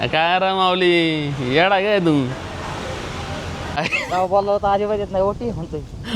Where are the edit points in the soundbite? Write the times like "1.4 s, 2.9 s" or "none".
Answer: 3.8 s